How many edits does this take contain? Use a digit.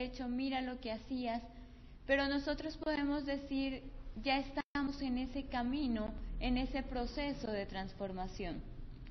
1